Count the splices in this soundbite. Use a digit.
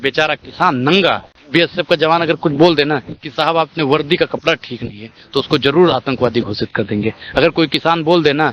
1